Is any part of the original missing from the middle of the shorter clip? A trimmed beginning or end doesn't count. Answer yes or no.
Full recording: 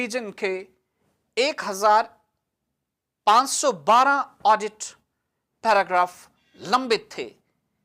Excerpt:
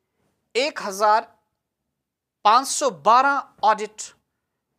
no